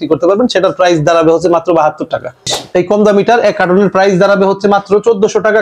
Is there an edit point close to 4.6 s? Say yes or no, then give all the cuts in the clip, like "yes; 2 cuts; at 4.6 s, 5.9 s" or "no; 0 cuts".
no; 1 cut; at 2.5 s